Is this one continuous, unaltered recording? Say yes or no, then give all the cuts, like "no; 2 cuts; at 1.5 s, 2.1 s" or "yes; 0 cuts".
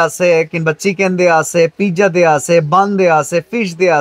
yes; 0 cuts